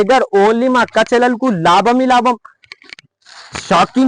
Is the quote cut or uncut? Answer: uncut